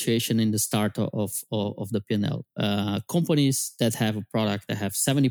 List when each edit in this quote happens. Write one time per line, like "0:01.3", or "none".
none